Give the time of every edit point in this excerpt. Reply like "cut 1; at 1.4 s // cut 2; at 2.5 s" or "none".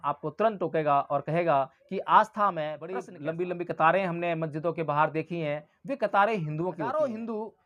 cut 1; at 3.1 s // cut 2; at 6.8 s